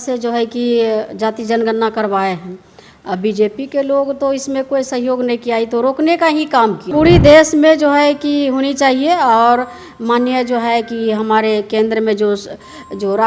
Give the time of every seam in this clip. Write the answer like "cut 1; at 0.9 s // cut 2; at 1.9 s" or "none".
cut 1; at 6.8 s